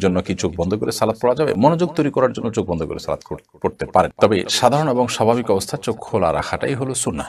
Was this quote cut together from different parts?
no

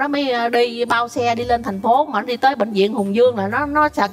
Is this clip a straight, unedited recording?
yes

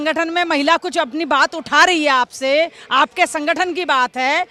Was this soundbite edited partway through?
no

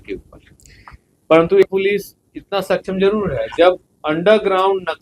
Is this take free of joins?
no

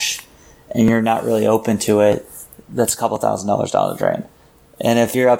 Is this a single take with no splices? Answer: yes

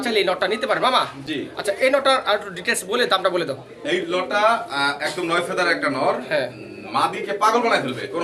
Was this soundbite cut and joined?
no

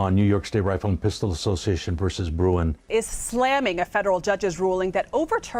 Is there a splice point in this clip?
no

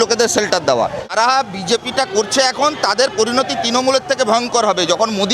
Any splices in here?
yes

